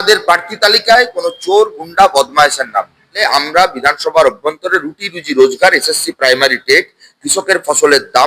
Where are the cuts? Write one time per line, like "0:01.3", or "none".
0:03.2